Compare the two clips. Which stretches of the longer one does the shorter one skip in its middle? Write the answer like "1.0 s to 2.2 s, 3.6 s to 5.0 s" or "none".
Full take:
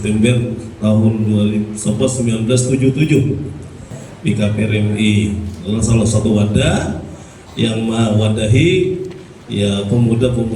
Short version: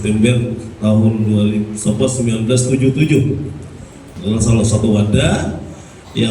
4.1 s to 5.5 s

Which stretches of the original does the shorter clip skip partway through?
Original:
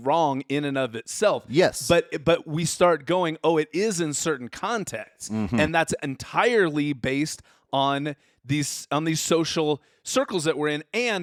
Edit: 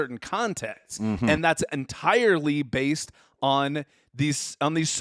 none

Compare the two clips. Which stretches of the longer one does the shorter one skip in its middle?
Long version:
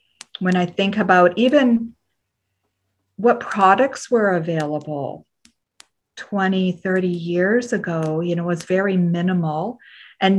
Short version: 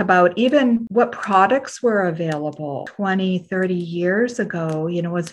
1.9 s to 3.1 s, 5.2 s to 6.2 s

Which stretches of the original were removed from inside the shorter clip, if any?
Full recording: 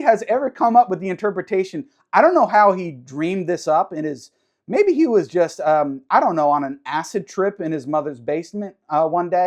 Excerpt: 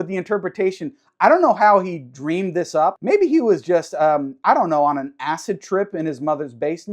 3.9 s to 4.6 s

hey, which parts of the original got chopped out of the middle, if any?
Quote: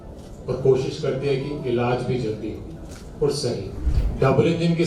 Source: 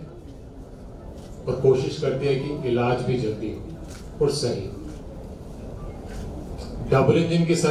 4.9 s to 6.6 s

